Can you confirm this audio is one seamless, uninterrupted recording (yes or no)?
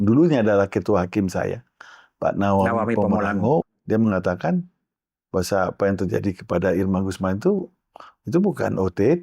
no